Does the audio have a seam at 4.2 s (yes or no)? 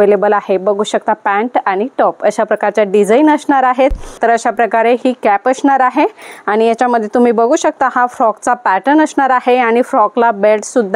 yes